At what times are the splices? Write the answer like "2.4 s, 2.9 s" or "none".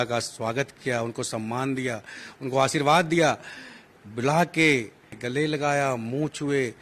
5.2 s